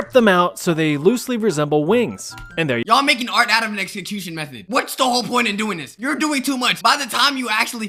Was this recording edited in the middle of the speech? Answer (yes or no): no